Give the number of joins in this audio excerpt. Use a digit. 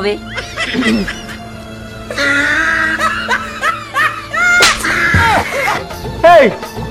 1